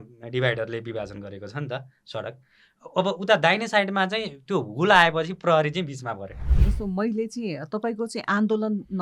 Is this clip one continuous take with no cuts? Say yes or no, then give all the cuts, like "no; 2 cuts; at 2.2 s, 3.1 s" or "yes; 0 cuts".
no; 1 cut; at 6.5 s